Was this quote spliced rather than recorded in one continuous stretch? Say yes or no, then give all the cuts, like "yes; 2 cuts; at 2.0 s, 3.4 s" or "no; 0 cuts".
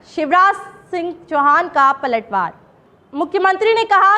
no; 0 cuts